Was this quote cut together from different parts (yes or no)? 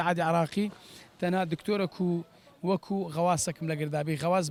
no